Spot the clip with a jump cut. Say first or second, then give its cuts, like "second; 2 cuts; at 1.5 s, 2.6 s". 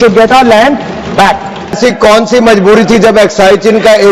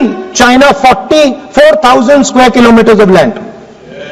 first; 1 cut; at 1.8 s